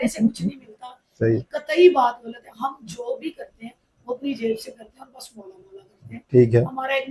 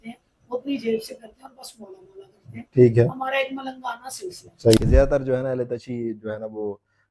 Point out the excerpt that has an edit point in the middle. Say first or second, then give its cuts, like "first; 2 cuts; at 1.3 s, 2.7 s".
second; 1 cut; at 4.8 s